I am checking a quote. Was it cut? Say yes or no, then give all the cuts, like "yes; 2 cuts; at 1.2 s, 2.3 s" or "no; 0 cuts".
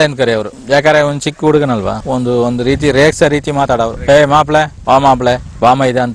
no; 0 cuts